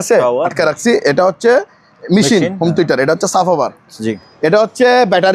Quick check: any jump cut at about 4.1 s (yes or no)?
yes